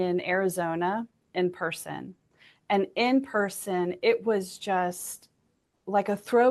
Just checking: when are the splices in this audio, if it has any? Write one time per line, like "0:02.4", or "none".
none